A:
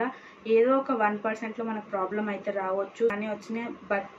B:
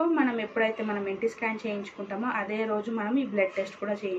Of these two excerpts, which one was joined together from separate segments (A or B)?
A